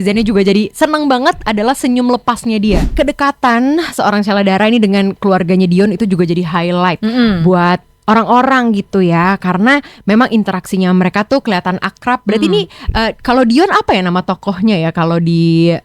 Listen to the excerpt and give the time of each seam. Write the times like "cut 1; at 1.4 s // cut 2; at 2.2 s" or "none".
cut 1; at 2.9 s

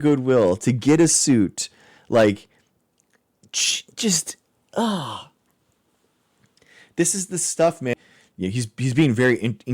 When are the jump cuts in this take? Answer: cut 1; at 7.9 s

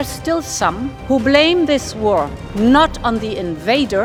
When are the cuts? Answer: none

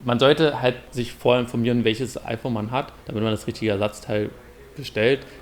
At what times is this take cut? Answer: cut 1; at 0.9 s // cut 2; at 2.2 s

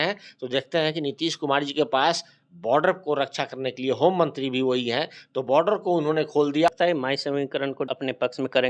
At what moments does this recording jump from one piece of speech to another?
cut 1; at 6.7 s

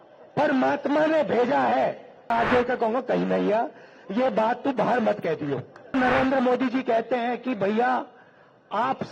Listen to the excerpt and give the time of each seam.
cut 1; at 2.3 s // cut 2; at 5.9 s

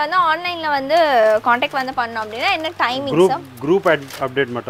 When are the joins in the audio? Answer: none

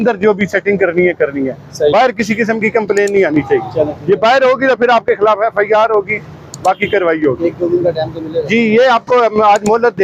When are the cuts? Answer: none

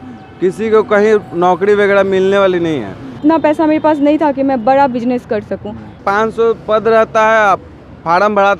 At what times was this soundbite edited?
cut 1; at 3.2 s // cut 2; at 6.0 s

